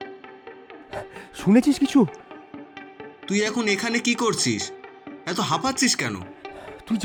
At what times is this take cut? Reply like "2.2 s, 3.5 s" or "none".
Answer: none